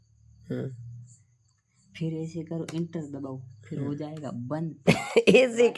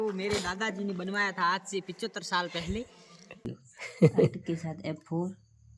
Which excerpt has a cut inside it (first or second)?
second